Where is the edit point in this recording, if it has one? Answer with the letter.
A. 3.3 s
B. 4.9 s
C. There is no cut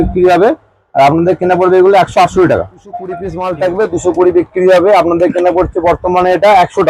A